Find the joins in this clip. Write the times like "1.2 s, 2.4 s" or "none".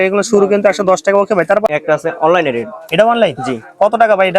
1.7 s